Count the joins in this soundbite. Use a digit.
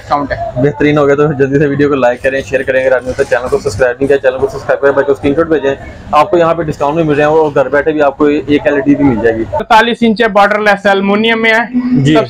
1